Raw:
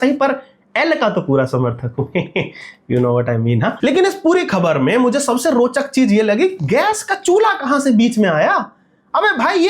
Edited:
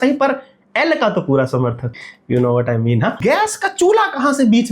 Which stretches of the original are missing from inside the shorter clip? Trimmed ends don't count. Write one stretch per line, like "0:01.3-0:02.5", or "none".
0:02.0-0:02.6
0:03.8-0:06.6